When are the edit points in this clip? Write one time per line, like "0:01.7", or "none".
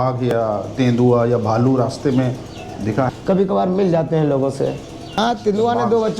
0:03.1
0:05.2

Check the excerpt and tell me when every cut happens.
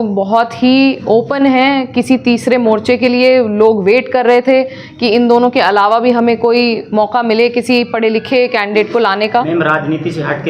0:09.5

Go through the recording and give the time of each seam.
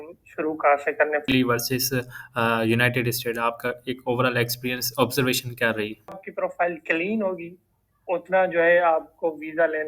0:01.2
0:06.2

